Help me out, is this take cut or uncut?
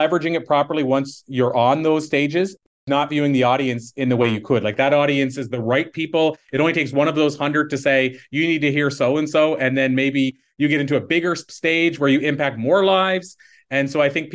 cut